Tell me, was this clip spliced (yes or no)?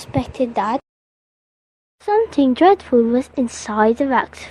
yes